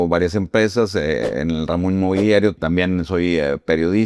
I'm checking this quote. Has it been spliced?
yes; 1 cut; at 2.6 s

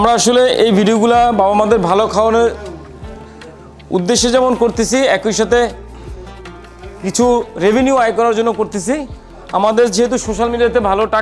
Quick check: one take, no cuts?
yes; 0 cuts

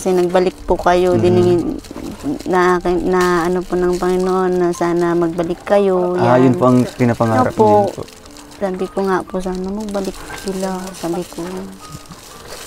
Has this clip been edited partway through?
no; 0 cuts

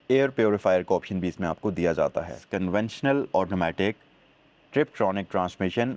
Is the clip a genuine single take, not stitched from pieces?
no; 1 cut; at 2.4 s

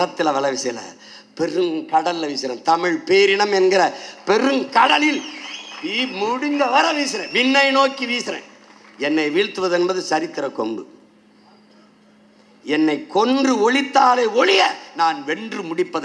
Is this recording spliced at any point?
no; 0 cuts

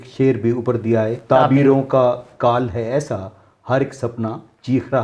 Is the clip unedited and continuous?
no; 1 cut; at 1.2 s

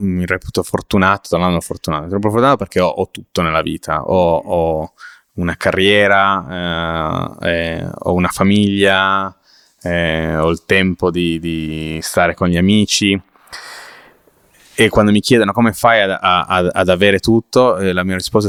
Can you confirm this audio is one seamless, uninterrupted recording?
yes; 0 cuts

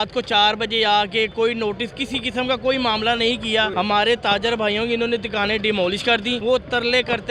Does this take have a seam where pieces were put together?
yes; 2 cuts; at 3.7 s, 6.4 s

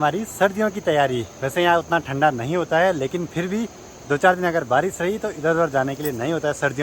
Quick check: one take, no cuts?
yes; 0 cuts

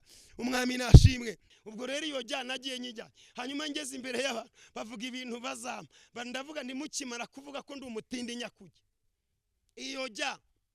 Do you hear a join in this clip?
yes; 1 cut; at 1.5 s

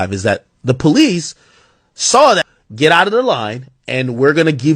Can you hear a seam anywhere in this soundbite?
yes; 1 cut; at 2.5 s

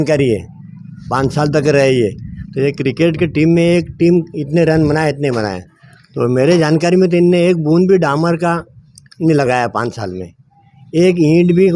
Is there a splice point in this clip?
no; 0 cuts

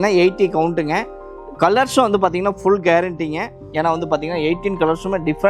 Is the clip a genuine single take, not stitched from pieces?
yes; 0 cuts

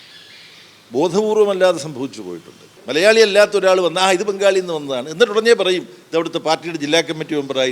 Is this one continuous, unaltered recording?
no; 1 cut; at 2.8 s

